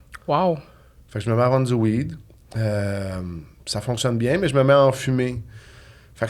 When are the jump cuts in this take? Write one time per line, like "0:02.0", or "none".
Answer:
none